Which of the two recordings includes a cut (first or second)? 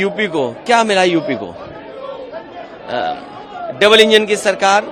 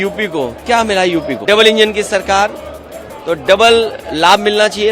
second